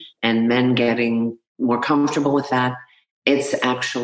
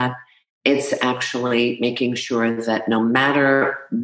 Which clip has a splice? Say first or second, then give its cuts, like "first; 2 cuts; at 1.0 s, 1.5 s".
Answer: first; 1 cut; at 1.4 s